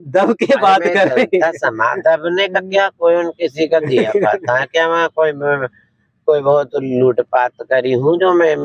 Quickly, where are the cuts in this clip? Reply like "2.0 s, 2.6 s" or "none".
none

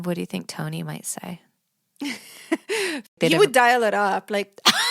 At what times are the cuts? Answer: 3.1 s

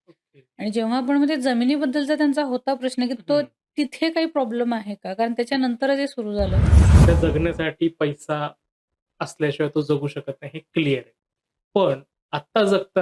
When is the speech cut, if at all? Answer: 6.9 s

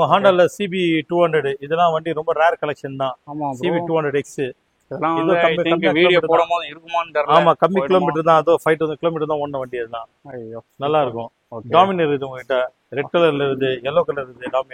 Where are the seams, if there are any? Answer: none

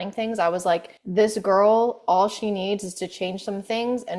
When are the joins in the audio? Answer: 1.0 s

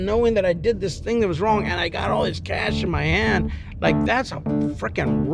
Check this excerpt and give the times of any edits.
none

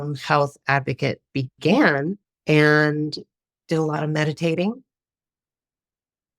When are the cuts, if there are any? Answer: 2.3 s

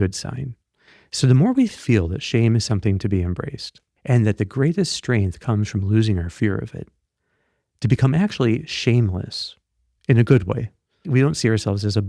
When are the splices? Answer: 3.9 s, 11.0 s

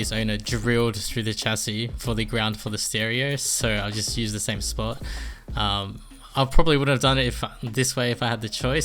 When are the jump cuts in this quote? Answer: none

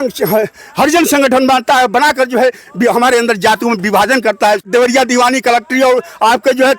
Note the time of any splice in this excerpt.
4.7 s

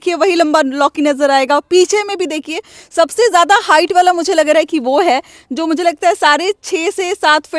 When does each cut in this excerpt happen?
none

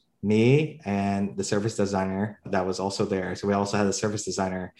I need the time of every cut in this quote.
none

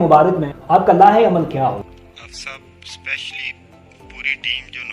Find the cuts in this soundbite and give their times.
1.8 s

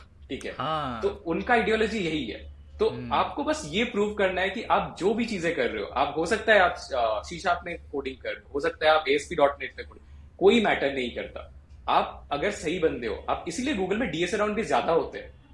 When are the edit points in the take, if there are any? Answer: none

